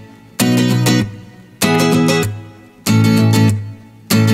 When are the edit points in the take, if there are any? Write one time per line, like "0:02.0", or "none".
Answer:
none